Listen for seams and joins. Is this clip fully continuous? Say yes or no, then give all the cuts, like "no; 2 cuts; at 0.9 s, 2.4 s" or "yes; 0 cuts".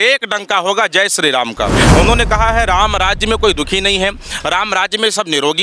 no; 1 cut; at 1.8 s